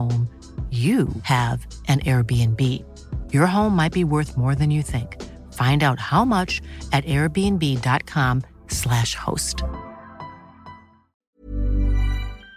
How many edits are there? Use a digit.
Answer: 1